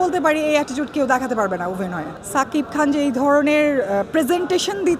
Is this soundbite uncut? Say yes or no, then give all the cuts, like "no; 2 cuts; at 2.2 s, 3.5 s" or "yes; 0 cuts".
no; 1 cut; at 2.1 s